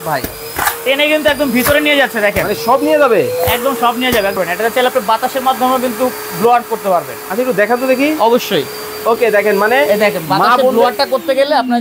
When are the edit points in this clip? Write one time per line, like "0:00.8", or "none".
0:04.4